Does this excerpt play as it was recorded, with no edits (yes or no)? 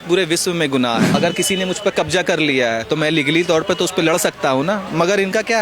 no